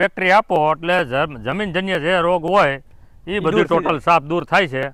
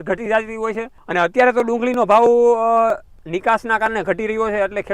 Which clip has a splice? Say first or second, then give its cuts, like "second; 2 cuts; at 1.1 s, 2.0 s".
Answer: second; 1 cut; at 1.0 s